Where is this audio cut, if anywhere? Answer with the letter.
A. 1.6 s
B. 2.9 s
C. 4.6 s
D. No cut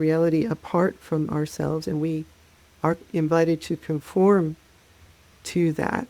D